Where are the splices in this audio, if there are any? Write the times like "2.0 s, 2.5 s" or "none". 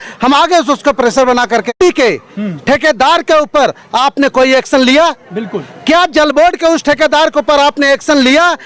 1.8 s